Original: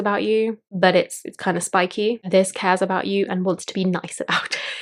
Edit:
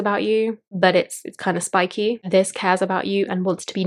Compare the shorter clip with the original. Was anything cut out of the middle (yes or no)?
no